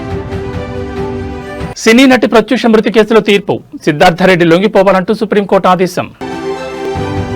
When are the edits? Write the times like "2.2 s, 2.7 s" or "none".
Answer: 1.4 s